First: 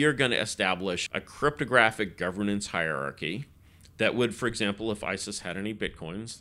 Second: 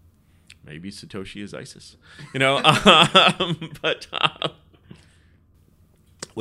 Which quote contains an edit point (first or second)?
first